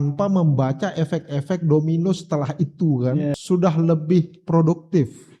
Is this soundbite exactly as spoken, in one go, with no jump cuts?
no; 1 cut; at 3.4 s

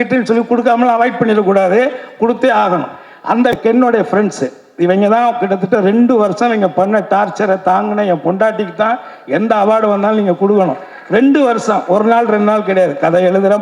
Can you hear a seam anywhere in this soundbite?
yes; 1 cut; at 3.5 s

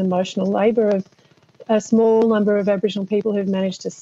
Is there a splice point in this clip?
no; 0 cuts

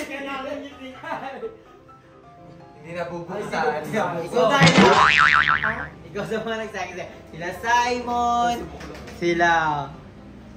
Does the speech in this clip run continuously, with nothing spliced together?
yes; 0 cuts

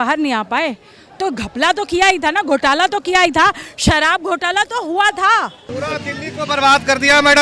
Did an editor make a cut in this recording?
yes; 1 cut; at 5.6 s

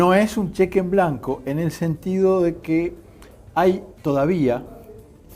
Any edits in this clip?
yes; 1 cut; at 2.4 s

